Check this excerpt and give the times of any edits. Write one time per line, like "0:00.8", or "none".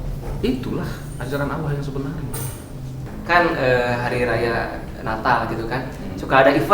0:03.1